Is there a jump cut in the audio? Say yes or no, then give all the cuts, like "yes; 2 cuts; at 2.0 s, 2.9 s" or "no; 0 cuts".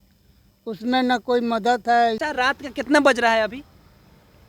yes; 1 cut; at 2.2 s